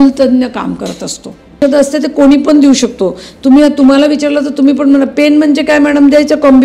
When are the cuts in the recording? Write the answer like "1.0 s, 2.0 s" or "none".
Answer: 1.6 s